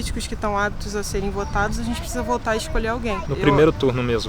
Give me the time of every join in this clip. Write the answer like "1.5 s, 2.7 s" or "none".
3.2 s